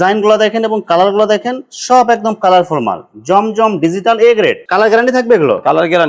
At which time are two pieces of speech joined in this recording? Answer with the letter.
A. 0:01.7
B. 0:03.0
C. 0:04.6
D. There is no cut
D